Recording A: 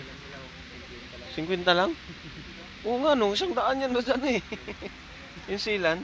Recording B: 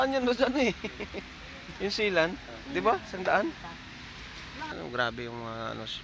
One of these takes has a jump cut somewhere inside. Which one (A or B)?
B